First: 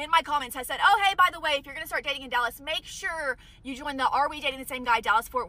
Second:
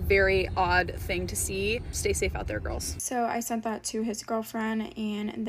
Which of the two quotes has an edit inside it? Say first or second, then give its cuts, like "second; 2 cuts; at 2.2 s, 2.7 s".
second; 2 cuts; at 1.9 s, 2.9 s